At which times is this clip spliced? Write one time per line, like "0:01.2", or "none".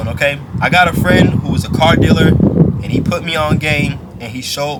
none